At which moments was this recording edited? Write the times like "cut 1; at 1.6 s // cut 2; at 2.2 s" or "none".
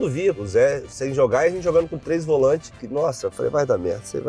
cut 1; at 2.8 s